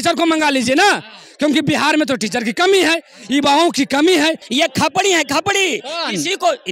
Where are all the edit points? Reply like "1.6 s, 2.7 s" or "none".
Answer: 4.4 s